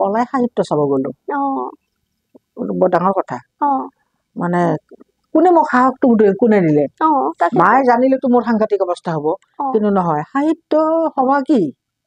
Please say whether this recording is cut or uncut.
uncut